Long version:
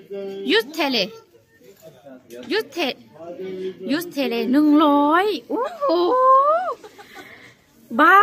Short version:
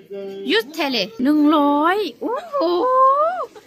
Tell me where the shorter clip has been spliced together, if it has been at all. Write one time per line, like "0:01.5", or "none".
0:01.2